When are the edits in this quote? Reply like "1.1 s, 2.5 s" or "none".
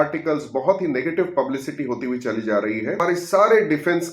3.0 s